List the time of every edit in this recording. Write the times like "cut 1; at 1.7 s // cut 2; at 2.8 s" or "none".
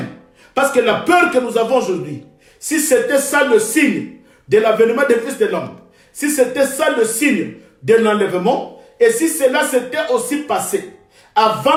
none